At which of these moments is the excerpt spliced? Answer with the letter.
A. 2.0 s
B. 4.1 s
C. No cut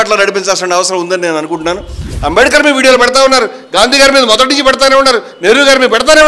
A